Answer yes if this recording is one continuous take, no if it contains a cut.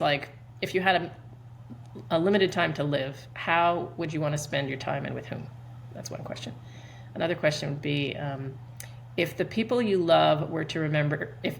yes